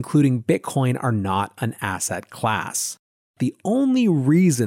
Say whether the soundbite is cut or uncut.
cut